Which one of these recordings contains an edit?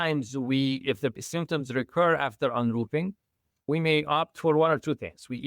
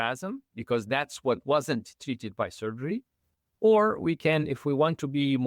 first; 2 cuts; at 1.2 s, 3.7 s

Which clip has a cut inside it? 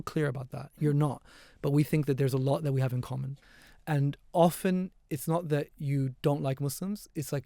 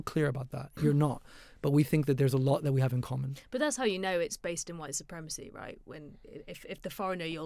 first; 1 cut; at 3.3 s

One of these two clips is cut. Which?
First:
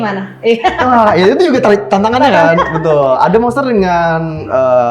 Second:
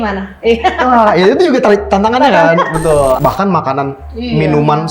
second; 1 cut; at 3.2 s

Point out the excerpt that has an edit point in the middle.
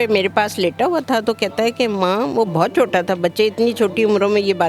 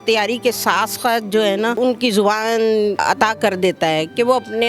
second; 2 cuts; at 1.8 s, 3.0 s

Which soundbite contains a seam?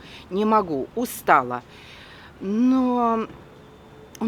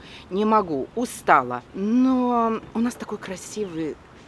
second; 2 cuts; at 1.6 s, 2.7 s

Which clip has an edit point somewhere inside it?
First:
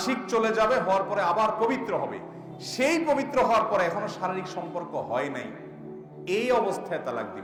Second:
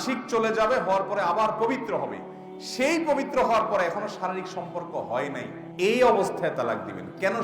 second; 1 cut; at 5.6 s

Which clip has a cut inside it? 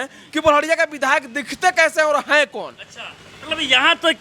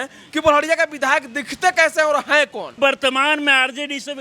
second; 1 cut; at 2.8 s

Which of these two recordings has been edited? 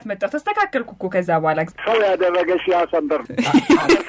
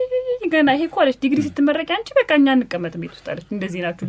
first; 2 cuts; at 1.7 s, 3.2 s

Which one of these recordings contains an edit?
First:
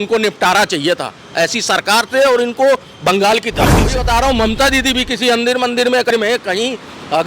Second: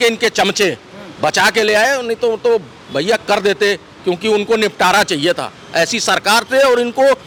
first; 2 cuts; at 4.0 s, 6.1 s

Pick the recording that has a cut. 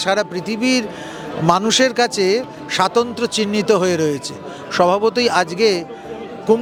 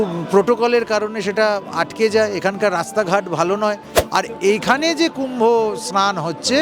second; 1 cut; at 3.9 s

